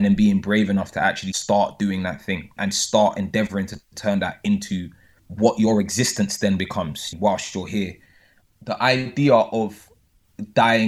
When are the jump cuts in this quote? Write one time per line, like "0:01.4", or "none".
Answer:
0:01.3
0:02.5
0:07.1